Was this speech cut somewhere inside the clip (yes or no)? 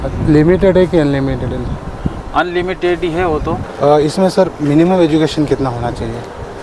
yes